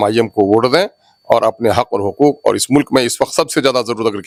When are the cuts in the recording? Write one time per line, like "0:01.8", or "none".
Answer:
none